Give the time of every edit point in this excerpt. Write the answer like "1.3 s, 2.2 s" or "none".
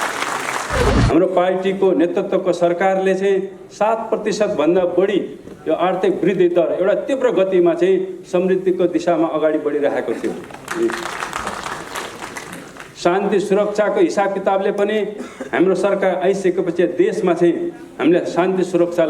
0.9 s